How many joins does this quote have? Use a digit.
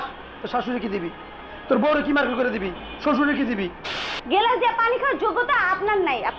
1